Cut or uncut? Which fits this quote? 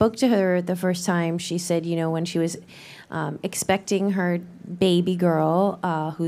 cut